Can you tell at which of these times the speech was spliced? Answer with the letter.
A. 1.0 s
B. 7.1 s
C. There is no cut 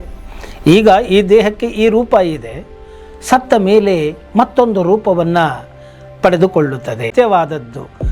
B